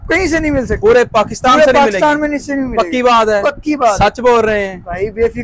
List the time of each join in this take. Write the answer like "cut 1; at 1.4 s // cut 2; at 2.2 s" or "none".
none